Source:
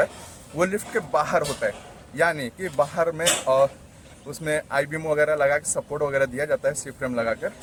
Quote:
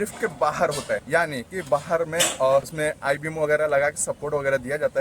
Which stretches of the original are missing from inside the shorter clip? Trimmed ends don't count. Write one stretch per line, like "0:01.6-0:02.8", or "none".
0:01.8-0:02.1
0:03.8-0:04.4